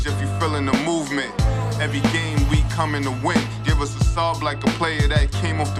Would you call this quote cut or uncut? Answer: uncut